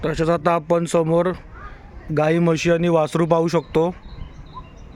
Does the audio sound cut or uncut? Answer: uncut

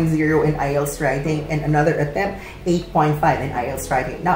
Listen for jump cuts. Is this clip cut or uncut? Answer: uncut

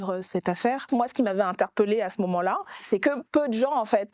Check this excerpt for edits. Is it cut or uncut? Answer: cut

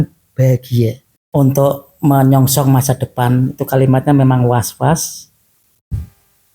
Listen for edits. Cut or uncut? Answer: cut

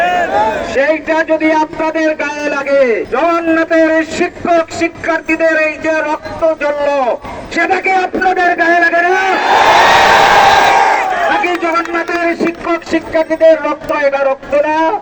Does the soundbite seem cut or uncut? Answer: uncut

